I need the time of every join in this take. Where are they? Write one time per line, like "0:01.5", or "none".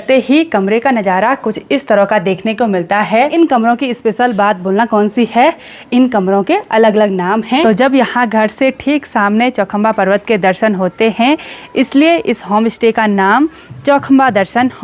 0:03.3
0:07.6